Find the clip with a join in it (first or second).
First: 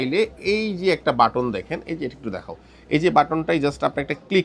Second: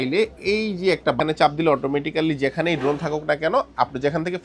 second